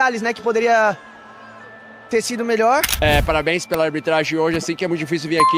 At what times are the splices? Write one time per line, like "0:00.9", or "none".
0:02.9